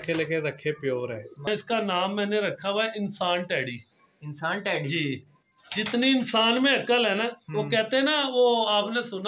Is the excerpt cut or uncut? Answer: cut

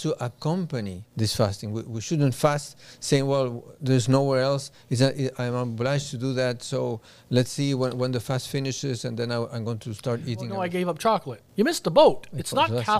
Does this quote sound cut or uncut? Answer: cut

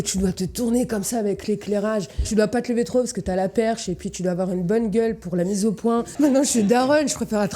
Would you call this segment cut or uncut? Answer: cut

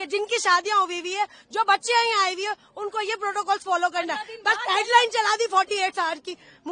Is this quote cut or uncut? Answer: uncut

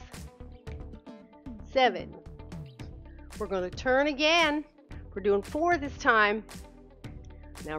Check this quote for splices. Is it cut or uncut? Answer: uncut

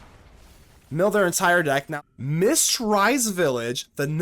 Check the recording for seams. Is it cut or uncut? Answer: cut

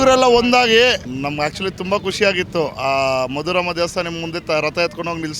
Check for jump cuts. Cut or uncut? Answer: cut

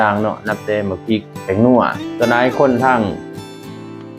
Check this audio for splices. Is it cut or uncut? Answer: cut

